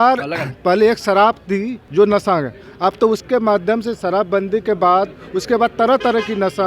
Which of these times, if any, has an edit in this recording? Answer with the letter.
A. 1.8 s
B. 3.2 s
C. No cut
A